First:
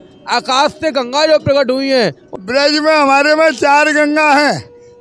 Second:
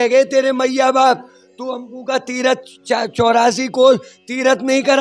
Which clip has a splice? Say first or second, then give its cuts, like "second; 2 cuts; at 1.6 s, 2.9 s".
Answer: first; 1 cut; at 2.2 s